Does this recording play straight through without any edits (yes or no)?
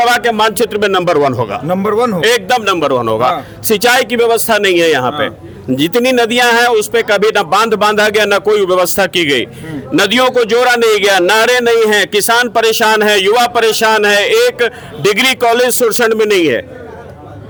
yes